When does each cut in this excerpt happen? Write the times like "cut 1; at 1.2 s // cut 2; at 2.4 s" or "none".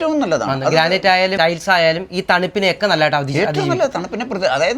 cut 1; at 1.3 s